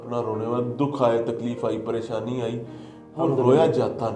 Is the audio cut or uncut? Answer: uncut